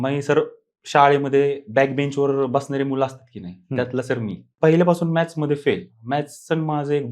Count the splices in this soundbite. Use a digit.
1